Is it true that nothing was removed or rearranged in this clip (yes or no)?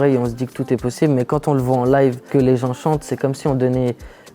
no